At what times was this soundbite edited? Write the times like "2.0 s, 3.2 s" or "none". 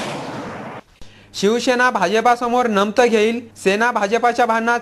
0.9 s